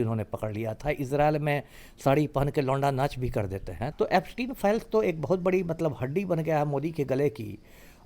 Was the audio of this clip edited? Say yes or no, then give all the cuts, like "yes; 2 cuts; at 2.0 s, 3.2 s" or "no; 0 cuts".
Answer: yes; 1 cut; at 3.8 s